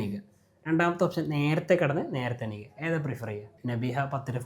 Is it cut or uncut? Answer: cut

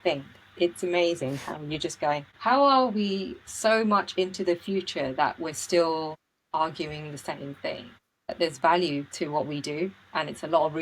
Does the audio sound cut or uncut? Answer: cut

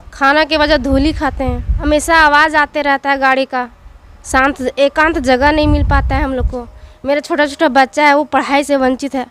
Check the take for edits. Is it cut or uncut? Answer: cut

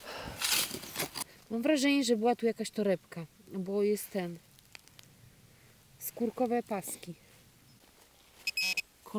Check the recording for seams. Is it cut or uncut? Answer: cut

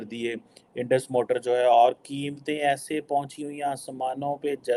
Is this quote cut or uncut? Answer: uncut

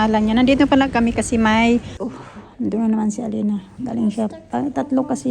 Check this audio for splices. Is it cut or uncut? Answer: cut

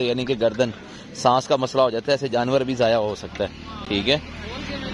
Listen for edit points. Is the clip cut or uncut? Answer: uncut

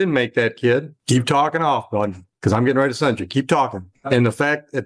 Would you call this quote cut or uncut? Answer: cut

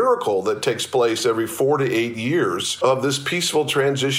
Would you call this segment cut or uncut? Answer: cut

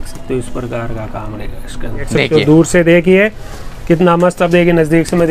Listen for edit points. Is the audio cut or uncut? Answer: cut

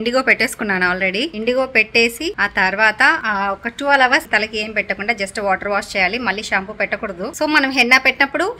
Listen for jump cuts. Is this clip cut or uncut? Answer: uncut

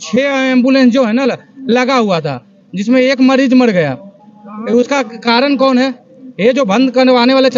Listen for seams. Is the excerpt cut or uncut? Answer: uncut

